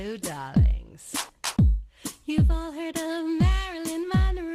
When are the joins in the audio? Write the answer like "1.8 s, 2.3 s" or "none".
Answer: 1.0 s

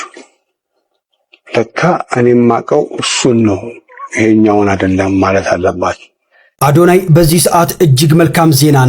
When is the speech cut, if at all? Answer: 6.4 s

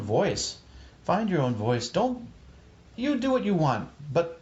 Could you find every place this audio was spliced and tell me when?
none

